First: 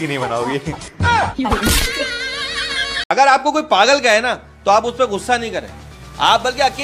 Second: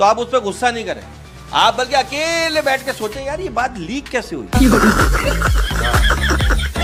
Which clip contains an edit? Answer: first; 1 cut; at 3.1 s

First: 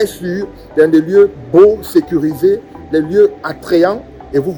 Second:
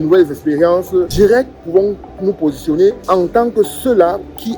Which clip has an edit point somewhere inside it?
second; 2 cuts; at 1.1 s, 3.0 s

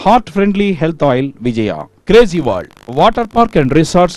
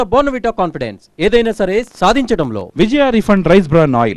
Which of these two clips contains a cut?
second; 1 cut; at 2.6 s

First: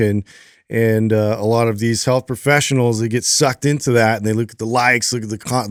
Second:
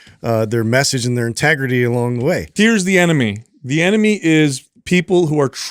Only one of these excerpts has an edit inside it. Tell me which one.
second; 1 cut; at 2.5 s

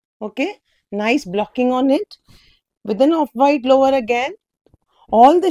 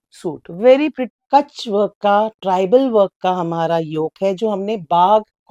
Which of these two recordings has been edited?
second; 1 cut; at 1.1 s

